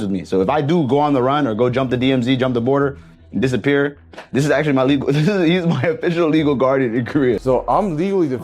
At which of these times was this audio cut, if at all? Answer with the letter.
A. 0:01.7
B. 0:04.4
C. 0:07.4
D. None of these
C